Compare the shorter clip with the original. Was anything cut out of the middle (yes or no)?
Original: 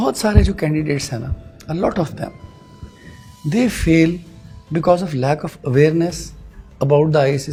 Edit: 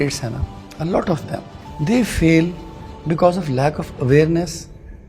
yes